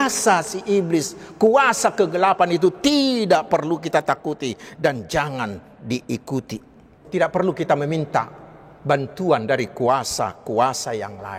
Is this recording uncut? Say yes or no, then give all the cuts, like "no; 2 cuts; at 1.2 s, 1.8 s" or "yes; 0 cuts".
no; 1 cut; at 7.0 s